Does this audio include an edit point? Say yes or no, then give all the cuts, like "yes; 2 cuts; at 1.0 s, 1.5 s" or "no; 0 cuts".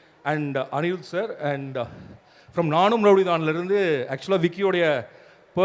no; 0 cuts